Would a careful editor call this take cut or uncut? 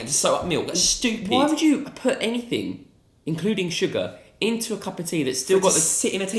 uncut